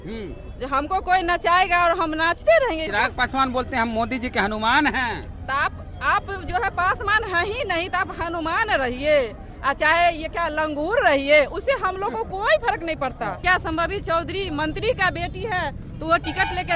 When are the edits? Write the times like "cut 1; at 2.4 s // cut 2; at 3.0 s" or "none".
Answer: cut 1; at 2.9 s // cut 2; at 13.4 s